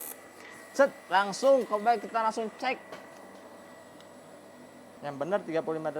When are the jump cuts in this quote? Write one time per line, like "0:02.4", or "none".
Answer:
0:05.0